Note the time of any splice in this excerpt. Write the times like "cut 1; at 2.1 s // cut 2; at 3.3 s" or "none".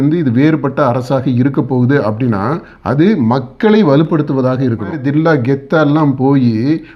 cut 1; at 5.0 s